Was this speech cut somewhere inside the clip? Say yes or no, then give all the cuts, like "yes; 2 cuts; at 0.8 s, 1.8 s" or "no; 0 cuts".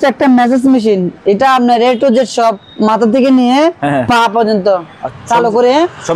yes; 1 cut; at 5.0 s